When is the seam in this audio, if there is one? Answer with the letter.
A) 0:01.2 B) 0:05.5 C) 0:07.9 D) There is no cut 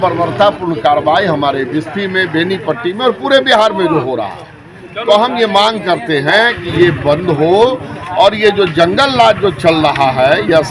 D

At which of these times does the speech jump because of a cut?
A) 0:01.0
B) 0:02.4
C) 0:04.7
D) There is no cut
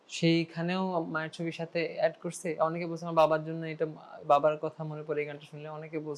D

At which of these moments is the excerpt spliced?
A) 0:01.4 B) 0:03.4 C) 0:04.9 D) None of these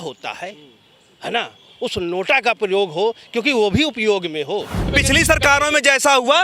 C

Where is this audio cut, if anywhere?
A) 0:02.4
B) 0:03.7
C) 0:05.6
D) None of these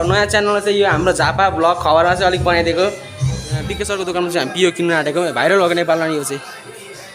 B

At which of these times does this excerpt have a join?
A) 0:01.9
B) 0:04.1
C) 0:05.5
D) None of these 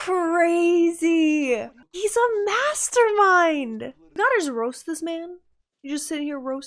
B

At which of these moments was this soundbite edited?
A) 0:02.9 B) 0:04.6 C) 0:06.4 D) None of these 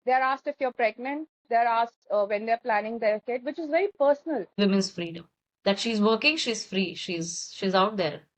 B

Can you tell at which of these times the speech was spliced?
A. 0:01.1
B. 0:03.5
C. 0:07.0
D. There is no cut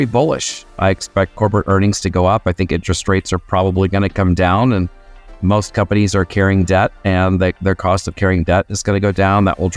A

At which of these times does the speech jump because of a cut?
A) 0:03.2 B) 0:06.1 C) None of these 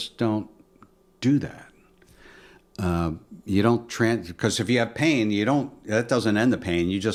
C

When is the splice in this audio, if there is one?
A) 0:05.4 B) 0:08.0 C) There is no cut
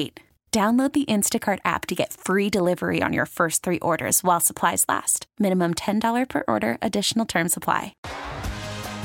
B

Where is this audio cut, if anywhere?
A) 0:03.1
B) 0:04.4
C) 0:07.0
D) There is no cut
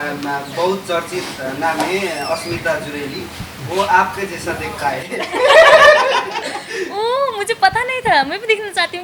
D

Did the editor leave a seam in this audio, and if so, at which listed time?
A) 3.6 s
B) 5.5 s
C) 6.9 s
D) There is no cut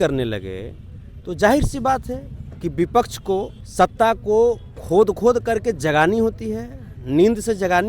A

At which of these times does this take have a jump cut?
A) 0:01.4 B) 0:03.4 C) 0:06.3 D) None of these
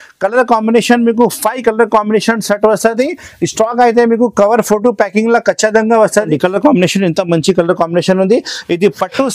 C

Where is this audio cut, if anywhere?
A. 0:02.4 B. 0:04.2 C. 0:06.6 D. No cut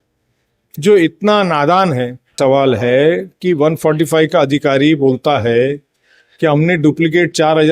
A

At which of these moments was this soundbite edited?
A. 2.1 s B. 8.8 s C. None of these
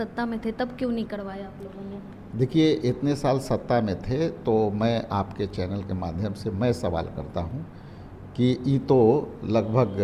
C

